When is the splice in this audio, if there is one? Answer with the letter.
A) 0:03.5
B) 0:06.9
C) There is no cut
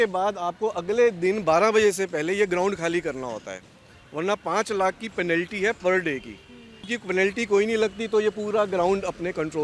B